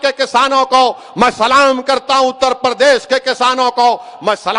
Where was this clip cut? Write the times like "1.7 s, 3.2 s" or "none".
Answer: none